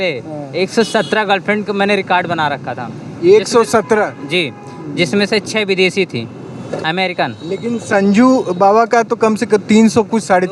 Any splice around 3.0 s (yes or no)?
no